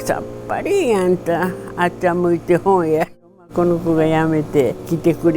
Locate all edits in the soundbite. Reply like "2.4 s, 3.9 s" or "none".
3.5 s